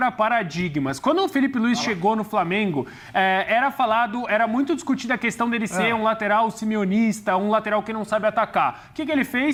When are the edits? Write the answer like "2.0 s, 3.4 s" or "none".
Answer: none